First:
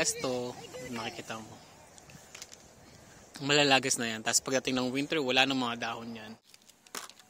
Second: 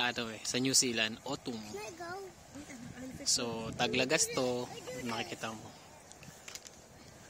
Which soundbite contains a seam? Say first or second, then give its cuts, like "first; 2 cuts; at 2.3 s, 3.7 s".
first; 1 cut; at 6.4 s